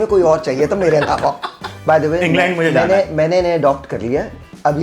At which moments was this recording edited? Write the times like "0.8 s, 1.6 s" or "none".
1.7 s